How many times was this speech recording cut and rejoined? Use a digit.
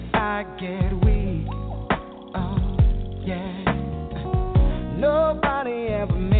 0